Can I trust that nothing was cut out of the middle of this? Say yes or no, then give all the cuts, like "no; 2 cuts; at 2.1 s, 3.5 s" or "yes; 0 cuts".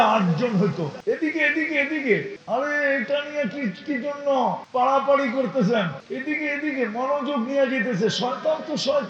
no; 4 cuts; at 1.0 s, 2.4 s, 4.6 s, 6.0 s